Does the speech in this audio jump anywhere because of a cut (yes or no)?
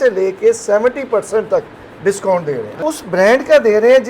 yes